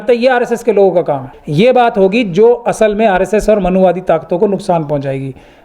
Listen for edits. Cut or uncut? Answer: cut